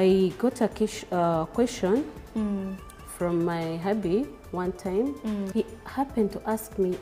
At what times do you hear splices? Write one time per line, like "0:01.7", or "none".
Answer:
0:05.5